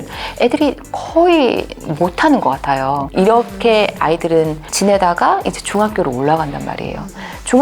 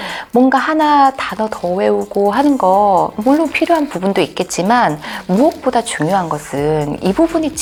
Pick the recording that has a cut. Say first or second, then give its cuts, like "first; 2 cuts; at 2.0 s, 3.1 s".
first; 2 cuts; at 3.1 s, 4.6 s